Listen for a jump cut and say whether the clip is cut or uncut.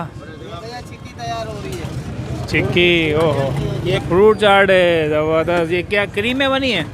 cut